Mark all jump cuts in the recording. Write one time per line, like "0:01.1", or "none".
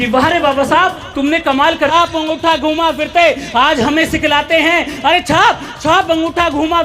0:01.9